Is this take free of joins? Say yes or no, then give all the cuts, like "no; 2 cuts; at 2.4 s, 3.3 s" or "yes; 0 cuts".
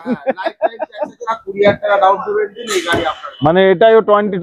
no; 1 cut; at 1.2 s